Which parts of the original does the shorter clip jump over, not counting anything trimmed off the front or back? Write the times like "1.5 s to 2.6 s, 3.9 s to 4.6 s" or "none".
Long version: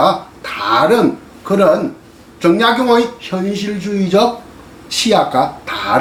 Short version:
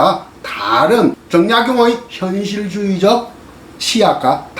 1.2 s to 2.3 s